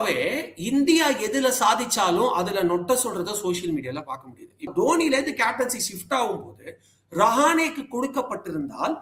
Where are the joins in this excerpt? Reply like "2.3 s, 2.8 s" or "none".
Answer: 4.7 s